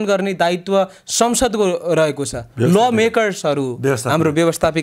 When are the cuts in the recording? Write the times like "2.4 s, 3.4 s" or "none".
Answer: none